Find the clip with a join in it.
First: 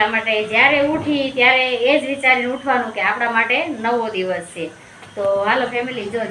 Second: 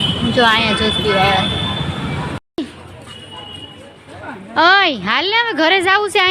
second; 1 cut; at 2.6 s

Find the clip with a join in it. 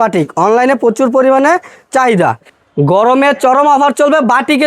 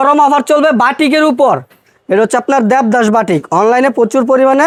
first; 1 cut; at 2.5 s

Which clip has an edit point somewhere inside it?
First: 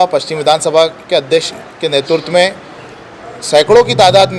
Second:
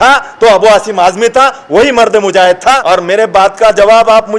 second; 1 cut; at 2.8 s

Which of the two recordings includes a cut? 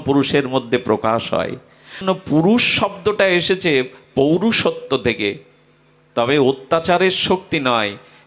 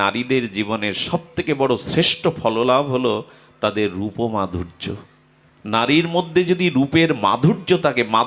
first; 1 cut; at 2.0 s

